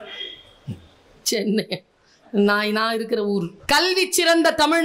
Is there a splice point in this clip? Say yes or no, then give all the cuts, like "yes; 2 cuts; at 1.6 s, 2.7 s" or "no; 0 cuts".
yes; 1 cut; at 3.5 s